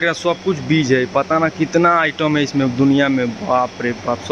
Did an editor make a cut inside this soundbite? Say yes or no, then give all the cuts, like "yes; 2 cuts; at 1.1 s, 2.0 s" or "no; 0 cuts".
no; 0 cuts